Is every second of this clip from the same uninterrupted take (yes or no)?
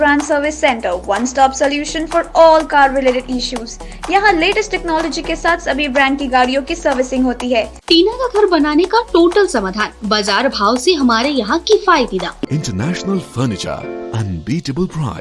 no